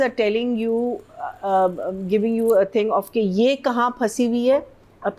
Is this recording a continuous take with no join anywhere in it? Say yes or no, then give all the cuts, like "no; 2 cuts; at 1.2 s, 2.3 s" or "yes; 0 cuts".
yes; 0 cuts